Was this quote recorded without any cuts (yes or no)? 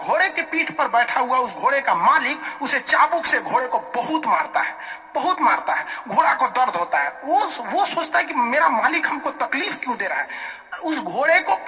yes